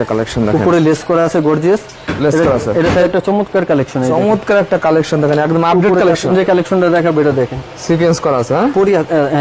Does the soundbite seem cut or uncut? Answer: cut